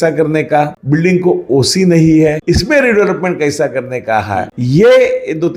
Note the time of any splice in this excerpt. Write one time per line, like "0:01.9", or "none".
none